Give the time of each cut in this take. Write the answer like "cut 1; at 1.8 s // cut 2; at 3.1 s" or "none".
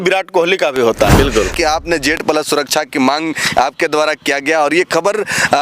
cut 1; at 1.5 s